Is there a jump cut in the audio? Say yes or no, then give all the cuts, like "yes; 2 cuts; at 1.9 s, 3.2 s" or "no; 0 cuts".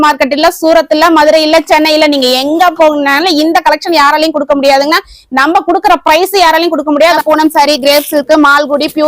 yes; 1 cut; at 7.2 s